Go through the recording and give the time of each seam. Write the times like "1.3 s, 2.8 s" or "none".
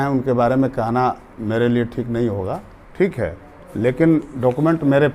none